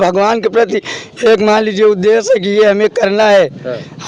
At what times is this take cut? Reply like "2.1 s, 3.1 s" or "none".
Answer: none